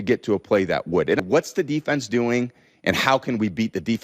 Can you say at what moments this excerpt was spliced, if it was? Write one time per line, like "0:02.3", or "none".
0:01.2

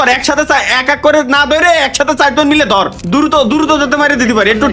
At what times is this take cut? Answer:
0:02.7

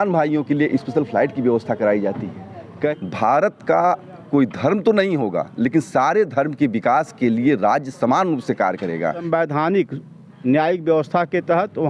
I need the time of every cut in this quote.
0:02.7
0:09.2

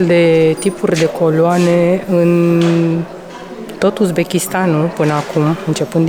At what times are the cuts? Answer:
none

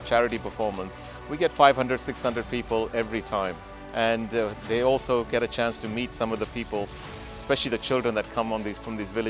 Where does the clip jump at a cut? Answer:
none

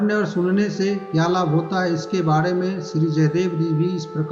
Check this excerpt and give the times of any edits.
none

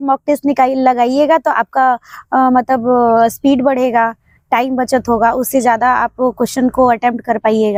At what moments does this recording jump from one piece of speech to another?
none

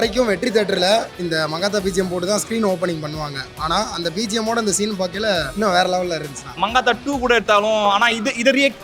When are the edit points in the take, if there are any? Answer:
0:01.1
0:05.5
0:06.4

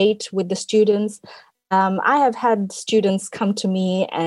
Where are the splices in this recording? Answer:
none

